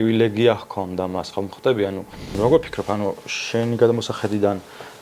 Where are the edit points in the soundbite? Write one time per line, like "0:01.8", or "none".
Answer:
0:02.3